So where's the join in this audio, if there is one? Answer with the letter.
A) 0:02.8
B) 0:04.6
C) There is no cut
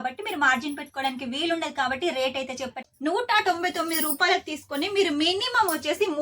A